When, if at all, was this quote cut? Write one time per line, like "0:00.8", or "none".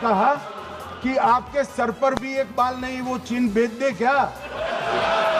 none